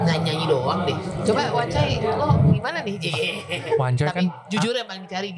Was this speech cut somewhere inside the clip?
no; 0 cuts

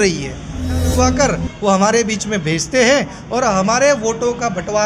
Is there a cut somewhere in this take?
yes; 1 cut; at 0.9 s

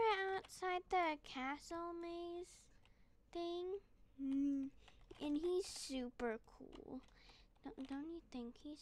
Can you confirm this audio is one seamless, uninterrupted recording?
yes; 0 cuts

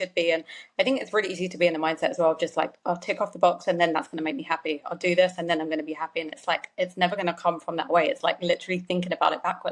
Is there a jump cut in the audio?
no; 0 cuts

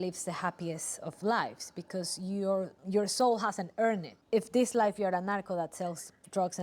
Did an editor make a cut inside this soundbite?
yes; 2 cuts; at 2.8 s, 4.1 s

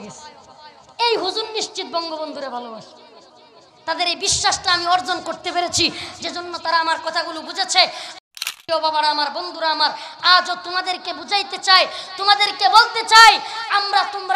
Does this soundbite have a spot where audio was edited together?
yes; 1 cut; at 8.1 s

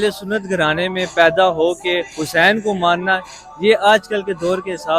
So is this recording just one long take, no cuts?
yes; 0 cuts

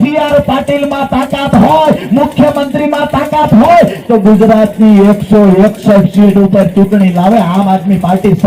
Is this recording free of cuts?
yes; 0 cuts

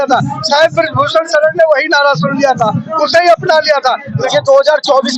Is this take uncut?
no; 1 cut; at 4.1 s

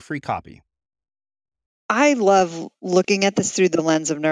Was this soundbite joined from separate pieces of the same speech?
yes; 1 cut; at 1.9 s

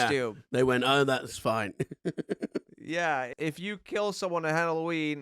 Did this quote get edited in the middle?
yes; 1 cut; at 3.3 s

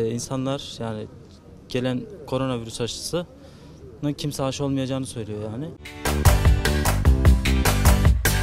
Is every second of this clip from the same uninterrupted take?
no; 1 cut; at 5.8 s

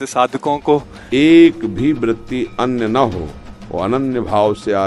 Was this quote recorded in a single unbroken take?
no; 1 cut; at 1.0 s

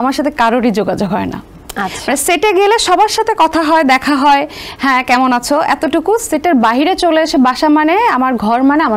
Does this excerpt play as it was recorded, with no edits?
yes; 0 cuts

